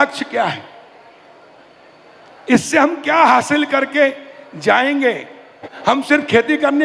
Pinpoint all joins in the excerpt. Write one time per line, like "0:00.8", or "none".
0:05.7